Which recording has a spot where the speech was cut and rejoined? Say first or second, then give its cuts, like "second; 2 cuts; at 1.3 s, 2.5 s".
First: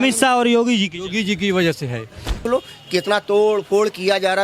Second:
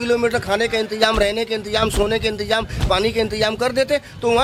first; 1 cut; at 2.4 s